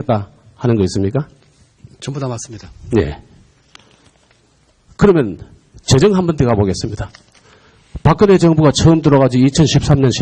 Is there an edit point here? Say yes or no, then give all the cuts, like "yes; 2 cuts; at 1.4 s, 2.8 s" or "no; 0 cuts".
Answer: yes; 1 cut; at 6.4 s